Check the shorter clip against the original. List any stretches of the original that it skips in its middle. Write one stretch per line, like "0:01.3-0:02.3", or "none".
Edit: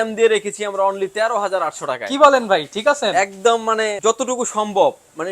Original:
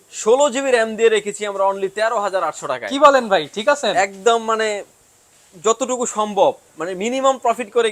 0:04.8-0:05.6